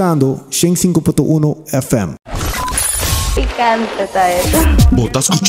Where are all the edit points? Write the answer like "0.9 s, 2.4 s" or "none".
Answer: 2.5 s